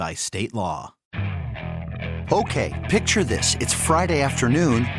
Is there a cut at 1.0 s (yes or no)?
yes